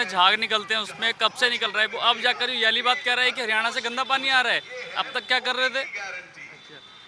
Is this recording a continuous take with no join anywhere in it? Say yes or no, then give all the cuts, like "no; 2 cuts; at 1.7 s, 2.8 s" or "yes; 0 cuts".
yes; 0 cuts